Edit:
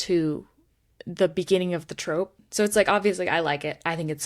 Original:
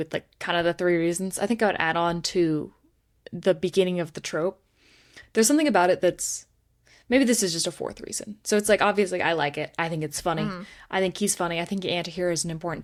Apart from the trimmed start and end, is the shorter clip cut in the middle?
yes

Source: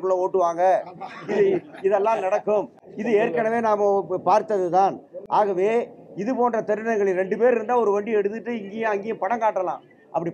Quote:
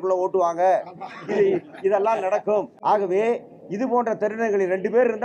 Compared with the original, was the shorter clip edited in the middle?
yes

